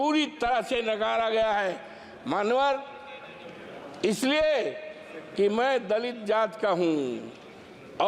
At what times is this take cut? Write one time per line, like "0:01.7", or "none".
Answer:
none